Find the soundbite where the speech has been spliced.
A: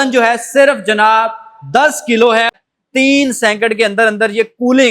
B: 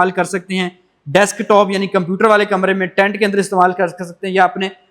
A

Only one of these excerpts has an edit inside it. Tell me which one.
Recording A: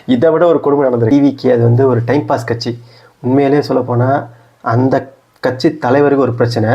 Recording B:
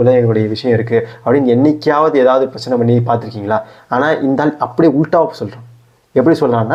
A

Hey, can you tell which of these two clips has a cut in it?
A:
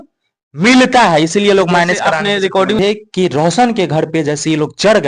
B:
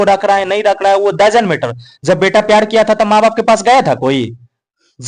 A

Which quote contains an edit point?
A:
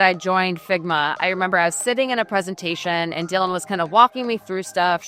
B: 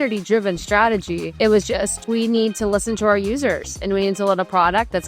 B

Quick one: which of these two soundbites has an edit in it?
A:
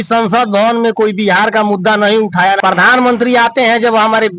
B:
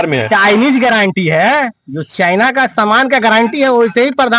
A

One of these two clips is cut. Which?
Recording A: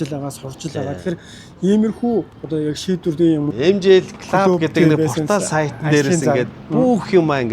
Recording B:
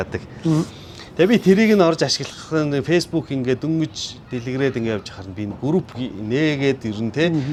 A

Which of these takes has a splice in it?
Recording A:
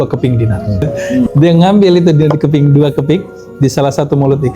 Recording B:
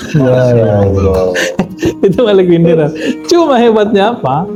A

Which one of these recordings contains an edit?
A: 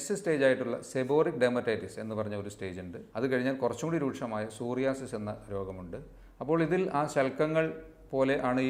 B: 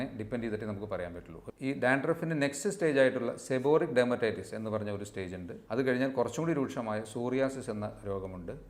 B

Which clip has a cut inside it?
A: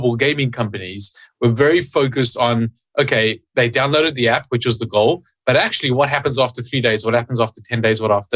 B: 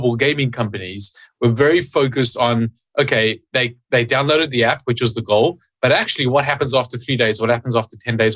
A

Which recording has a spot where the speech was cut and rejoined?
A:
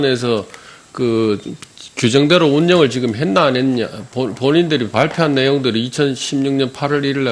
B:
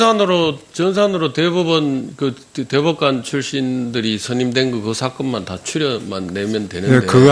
A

